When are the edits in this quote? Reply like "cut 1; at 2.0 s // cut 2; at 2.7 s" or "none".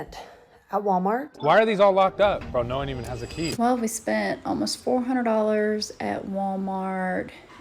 cut 1; at 1.3 s // cut 2; at 3.4 s